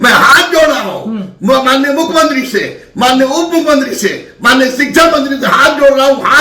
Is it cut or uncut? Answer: uncut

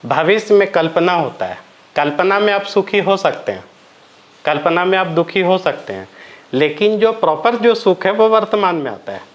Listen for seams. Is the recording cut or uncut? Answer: uncut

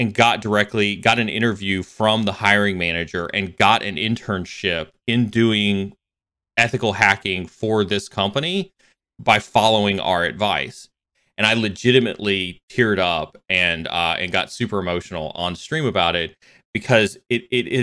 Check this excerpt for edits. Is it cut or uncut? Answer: cut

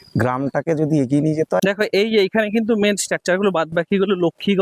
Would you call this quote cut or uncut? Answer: cut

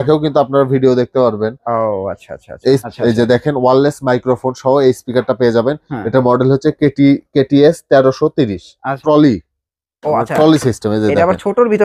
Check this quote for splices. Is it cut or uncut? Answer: cut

